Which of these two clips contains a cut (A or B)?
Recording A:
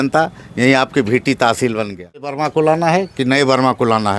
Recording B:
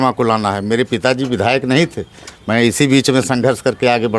A